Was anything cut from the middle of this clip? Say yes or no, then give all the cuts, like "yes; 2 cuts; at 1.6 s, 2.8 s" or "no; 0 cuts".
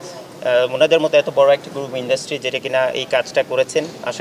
no; 0 cuts